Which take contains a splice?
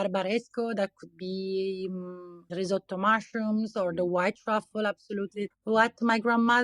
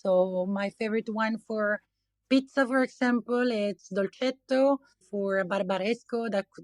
first; 2 cuts; at 2.5 s, 5.5 s

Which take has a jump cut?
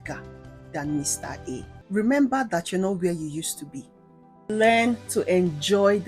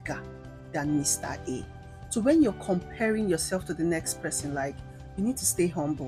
first; 2 cuts; at 1.7 s, 4.5 s

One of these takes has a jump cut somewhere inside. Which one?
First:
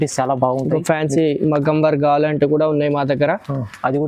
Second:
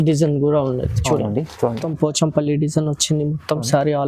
second; 1 cut; at 1.9 s

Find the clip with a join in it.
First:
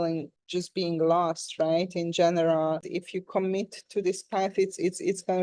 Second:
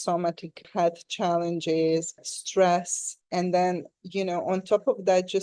first; 1 cut; at 2.9 s

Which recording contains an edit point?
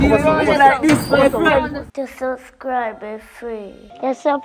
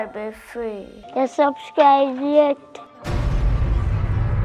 first; 1 cut; at 1.9 s

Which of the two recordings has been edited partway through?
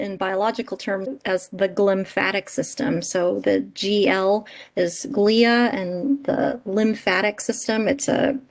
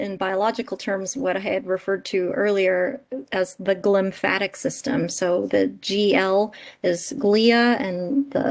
first; 1 cut; at 1.1 s

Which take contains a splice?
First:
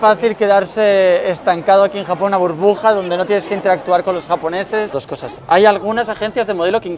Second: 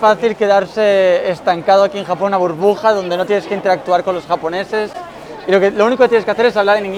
first; 1 cut; at 5.0 s

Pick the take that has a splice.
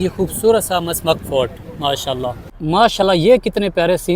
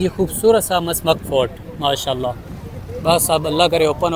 first; 1 cut; at 2.5 s

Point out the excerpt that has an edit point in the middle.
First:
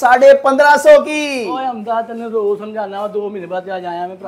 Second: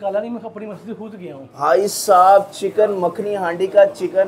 second; 1 cut; at 1.4 s

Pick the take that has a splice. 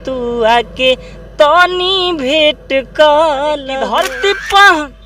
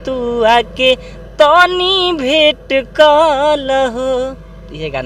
first; 1 cut; at 3.8 s

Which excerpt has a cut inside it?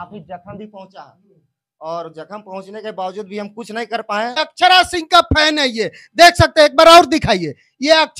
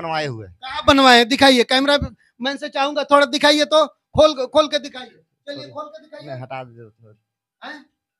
first; 1 cut; at 4.4 s

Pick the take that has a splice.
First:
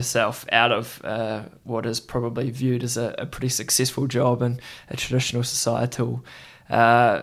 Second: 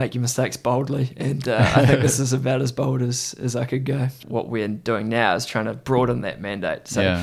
second; 1 cut; at 4.2 s

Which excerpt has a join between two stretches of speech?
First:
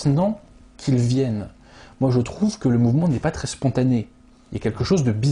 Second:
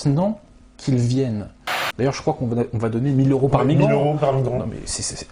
second; 1 cut; at 1.8 s

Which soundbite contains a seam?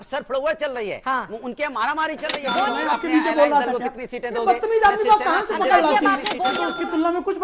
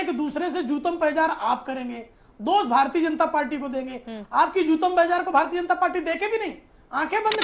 first; 2 cuts; at 2.5 s, 6.3 s

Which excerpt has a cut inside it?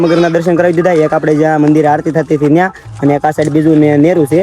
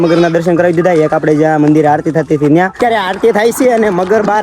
second; 1 cut; at 2.8 s

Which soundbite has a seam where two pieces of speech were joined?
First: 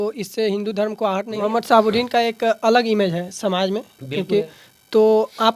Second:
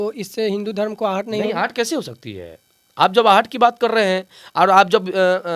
first; 1 cut; at 1.3 s

